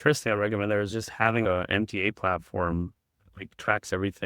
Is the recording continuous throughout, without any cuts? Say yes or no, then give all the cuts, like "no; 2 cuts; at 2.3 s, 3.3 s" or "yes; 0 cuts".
no; 1 cut; at 1.4 s